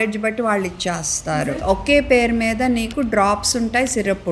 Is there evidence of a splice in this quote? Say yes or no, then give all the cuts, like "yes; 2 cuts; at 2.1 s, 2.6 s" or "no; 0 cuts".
yes; 1 cut; at 1.4 s